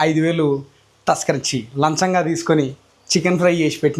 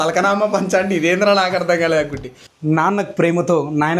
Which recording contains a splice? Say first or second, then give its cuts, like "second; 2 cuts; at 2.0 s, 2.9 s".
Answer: second; 1 cut; at 2.5 s